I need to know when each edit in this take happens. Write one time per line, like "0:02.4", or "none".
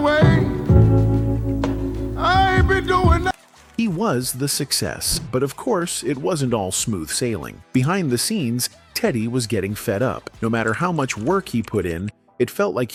none